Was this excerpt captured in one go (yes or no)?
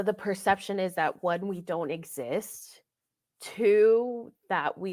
yes